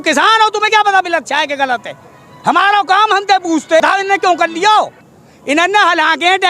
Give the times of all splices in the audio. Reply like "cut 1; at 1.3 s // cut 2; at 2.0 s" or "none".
cut 1; at 3.8 s